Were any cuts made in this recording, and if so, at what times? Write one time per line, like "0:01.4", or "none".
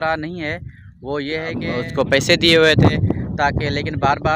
0:01.7